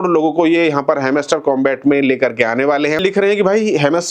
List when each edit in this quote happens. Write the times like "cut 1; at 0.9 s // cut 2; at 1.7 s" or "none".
cut 1; at 3.0 s